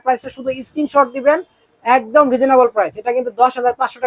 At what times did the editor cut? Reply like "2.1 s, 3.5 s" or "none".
none